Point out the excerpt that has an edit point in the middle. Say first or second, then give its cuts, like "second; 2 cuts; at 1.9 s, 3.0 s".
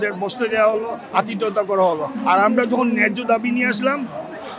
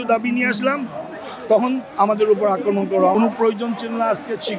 second; 1 cut; at 3.1 s